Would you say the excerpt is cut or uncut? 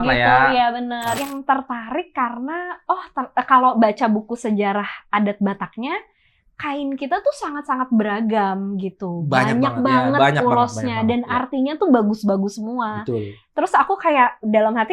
cut